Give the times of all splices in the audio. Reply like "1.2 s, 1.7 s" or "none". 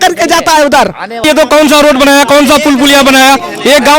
1.2 s